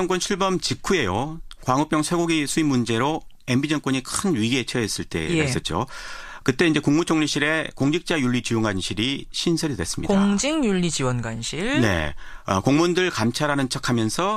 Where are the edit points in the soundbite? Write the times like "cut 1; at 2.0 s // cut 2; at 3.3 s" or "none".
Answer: cut 1; at 8.1 s